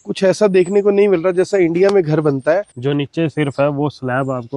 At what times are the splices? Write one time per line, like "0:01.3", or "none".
0:02.7